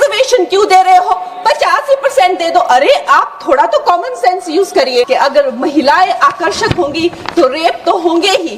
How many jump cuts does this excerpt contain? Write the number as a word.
one